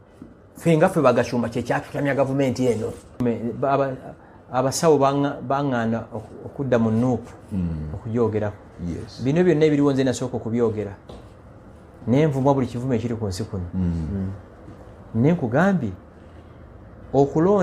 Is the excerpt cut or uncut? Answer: cut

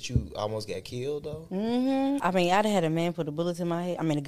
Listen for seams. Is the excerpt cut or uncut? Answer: cut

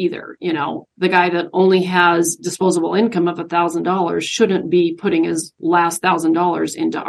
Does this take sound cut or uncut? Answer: cut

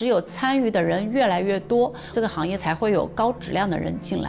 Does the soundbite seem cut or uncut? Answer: uncut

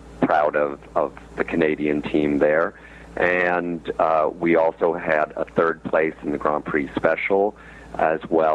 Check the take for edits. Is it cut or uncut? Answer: uncut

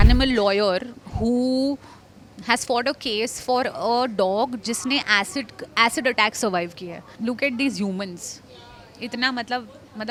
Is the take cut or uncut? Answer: uncut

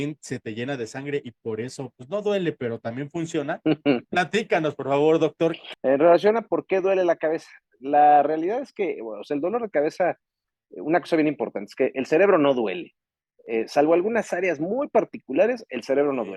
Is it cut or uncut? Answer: cut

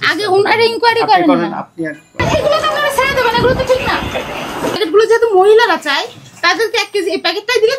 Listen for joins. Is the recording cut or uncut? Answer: cut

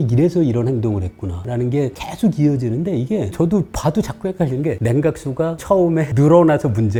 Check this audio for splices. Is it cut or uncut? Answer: uncut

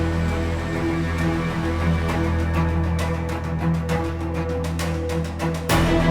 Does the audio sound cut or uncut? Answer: uncut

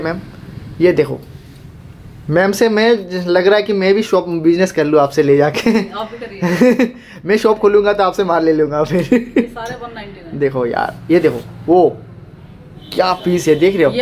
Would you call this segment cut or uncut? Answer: uncut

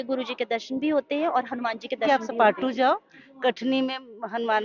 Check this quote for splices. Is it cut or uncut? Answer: cut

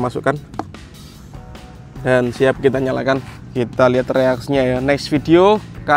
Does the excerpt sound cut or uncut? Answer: cut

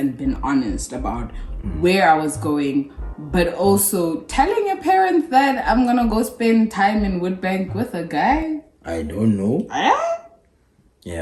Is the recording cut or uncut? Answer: uncut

